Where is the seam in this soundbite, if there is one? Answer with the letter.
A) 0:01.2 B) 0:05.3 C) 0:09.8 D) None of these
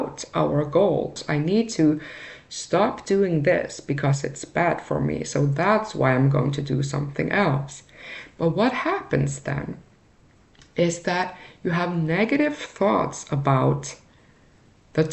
A